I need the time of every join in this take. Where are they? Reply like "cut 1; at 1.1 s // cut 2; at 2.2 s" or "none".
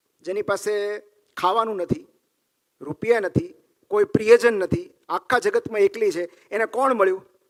none